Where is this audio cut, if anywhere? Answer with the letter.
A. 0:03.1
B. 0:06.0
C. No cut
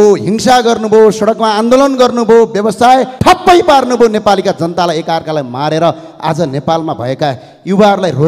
A